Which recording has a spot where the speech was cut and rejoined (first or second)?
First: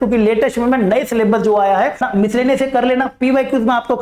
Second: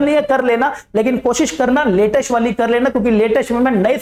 first